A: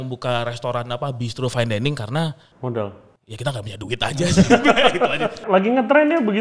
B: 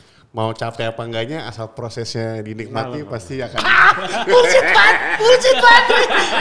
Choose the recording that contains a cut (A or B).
A